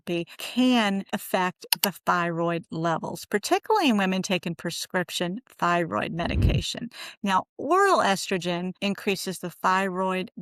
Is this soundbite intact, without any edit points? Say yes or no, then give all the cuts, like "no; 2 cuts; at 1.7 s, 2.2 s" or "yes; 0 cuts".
yes; 0 cuts